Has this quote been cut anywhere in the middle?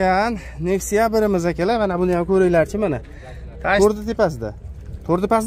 yes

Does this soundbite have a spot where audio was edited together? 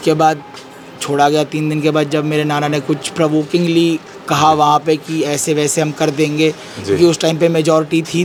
no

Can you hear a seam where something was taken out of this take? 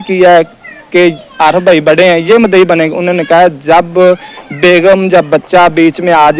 no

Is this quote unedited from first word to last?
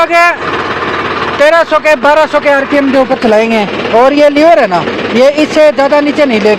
yes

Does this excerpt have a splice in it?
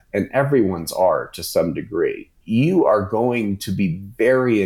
yes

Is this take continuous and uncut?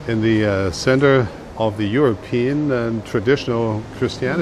no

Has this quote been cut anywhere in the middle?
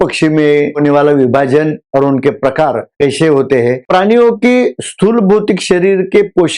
yes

